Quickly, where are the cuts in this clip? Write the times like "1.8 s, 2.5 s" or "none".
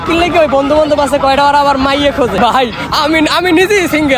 2.3 s